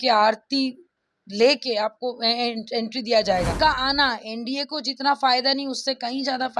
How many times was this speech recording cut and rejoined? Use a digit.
1